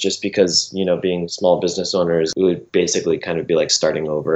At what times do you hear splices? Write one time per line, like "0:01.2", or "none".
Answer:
0:01.3
0:02.3